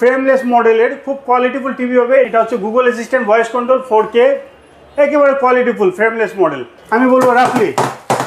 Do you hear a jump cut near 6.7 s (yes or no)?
yes